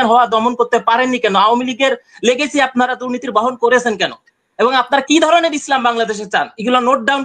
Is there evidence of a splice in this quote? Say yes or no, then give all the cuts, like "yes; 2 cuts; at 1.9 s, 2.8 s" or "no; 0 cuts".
no; 0 cuts